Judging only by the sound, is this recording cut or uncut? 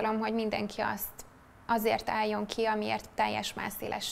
uncut